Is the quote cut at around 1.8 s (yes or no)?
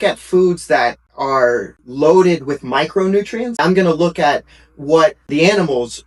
yes